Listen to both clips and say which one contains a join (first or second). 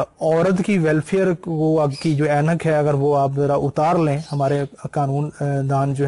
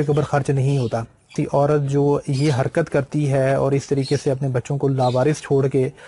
second